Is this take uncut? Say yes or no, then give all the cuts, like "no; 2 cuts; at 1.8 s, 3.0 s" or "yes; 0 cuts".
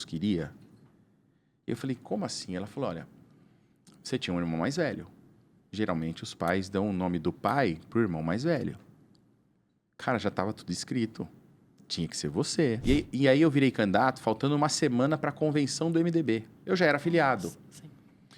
no; 1 cut; at 12.8 s